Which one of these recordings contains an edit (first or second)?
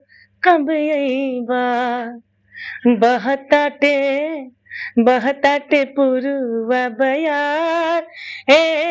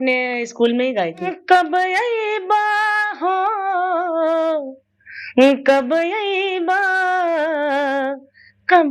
second